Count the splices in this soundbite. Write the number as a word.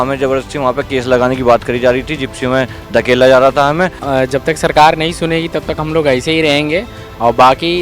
one